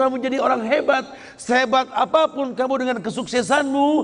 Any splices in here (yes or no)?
no